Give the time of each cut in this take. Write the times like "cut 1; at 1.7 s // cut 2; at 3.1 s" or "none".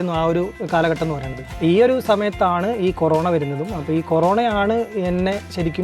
none